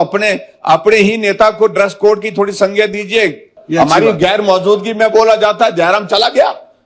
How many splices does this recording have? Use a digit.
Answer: 1